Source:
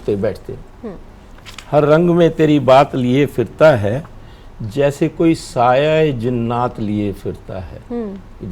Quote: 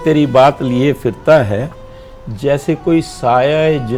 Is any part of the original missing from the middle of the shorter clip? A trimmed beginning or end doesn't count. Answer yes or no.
no